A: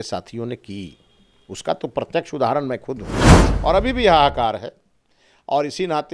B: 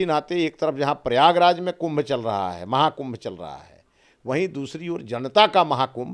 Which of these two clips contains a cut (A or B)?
A